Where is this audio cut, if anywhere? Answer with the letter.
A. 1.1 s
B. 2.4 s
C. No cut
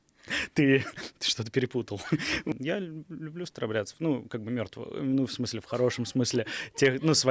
B